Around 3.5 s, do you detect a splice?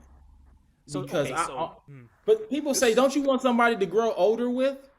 no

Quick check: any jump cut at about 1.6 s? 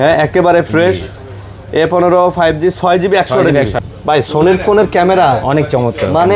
no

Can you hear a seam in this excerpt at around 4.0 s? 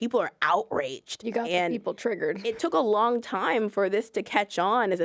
no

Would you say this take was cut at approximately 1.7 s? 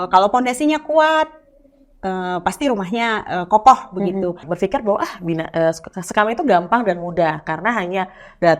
no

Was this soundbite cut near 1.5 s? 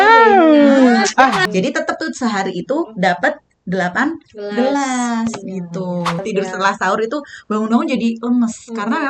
yes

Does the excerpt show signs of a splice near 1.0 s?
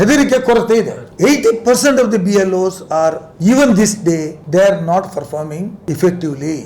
yes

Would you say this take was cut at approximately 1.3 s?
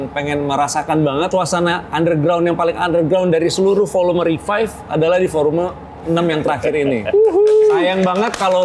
yes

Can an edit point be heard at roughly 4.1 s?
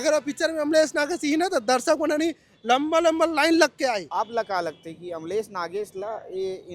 yes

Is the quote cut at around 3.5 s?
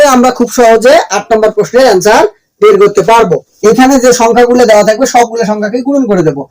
yes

